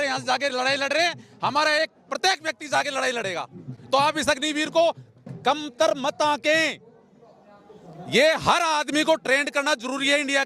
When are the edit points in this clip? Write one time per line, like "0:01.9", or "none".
none